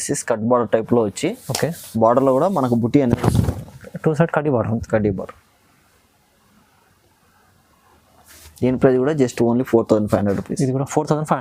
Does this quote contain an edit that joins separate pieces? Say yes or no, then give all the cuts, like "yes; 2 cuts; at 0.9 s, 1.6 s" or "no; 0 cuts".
no; 0 cuts